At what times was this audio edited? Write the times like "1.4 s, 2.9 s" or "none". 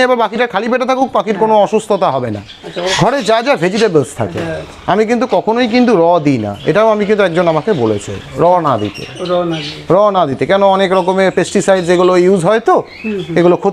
2.9 s